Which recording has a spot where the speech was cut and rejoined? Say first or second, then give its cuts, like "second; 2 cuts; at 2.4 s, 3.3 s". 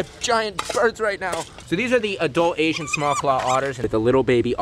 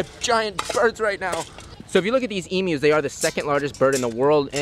first; 2 cuts; at 1.5 s, 3.9 s